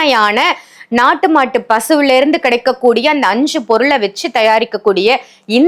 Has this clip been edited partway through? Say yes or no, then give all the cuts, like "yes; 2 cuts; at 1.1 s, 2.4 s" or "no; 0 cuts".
no; 0 cuts